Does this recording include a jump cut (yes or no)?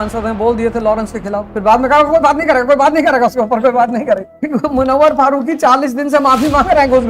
yes